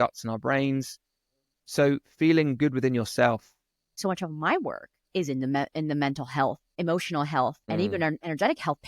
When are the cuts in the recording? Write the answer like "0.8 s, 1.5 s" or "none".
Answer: 3.9 s, 6.8 s, 7.7 s